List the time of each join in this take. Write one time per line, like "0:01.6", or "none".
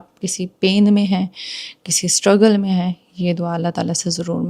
none